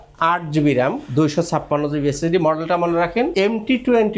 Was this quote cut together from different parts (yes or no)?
no